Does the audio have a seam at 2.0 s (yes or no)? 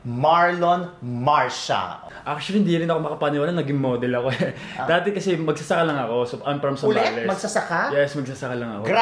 yes